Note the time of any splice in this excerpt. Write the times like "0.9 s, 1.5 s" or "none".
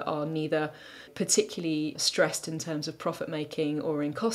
1.1 s, 2.0 s